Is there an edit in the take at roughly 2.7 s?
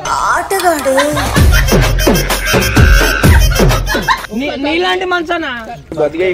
no; 1 cut; at 4.2 s

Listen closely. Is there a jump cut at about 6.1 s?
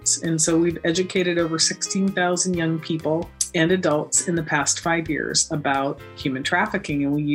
no; 1 cut; at 3.4 s

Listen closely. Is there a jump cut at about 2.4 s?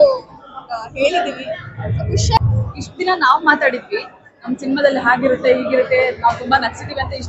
yes; 1 cut; at 2.4 s

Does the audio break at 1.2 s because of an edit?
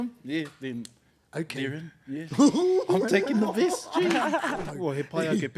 no; 1 cut; at 4.6 s

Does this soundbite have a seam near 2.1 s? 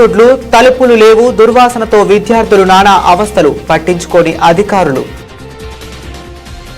no; 1 cut; at 5.1 s

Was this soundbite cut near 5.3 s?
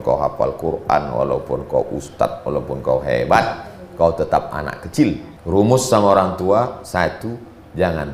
yes; 1 cut; at 5.3 s

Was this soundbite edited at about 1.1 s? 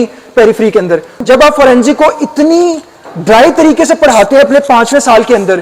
yes; 1 cut; at 1.1 s

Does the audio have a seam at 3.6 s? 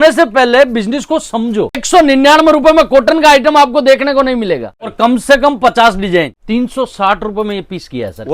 no; 3 cuts; at 1.8 s, 4.9 s, 6.4 s

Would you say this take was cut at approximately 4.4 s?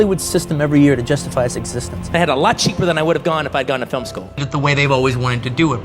yes; 2 cuts; at 2.1 s, 4.4 s

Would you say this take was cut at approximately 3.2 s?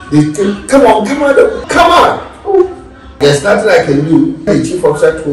yes; 3 cuts; at 1.6 s, 3.2 s, 4.5 s

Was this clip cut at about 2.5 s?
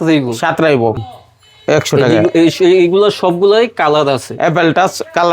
no; 1 cut; at 1.0 s

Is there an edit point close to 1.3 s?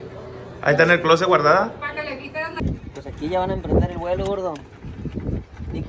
no; 1 cut; at 2.5 s

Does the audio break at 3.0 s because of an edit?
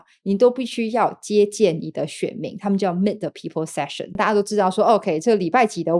no; 1 cut; at 4.2 s

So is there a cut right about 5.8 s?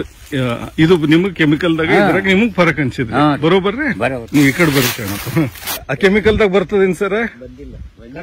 yes; 1 cut; at 5.8 s

